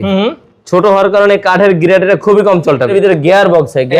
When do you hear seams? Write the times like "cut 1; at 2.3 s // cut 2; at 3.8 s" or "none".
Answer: cut 1; at 2.9 s